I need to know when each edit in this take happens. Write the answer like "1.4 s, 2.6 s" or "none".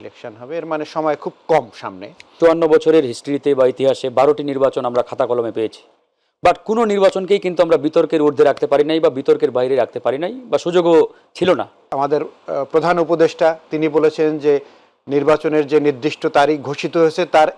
2.4 s, 11.9 s